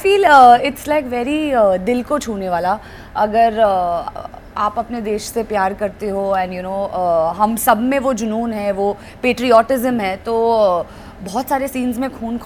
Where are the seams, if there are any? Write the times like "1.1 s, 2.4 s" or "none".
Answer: none